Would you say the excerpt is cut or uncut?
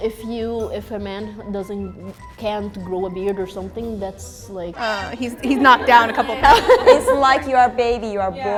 uncut